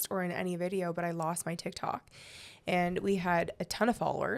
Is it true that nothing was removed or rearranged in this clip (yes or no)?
yes